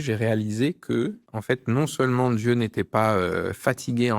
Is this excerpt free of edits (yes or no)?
no